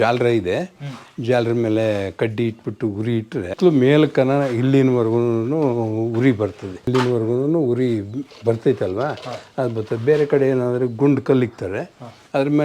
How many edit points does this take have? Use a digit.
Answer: 2